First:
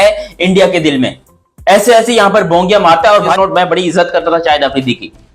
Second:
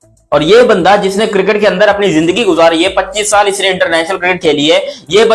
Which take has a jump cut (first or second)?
first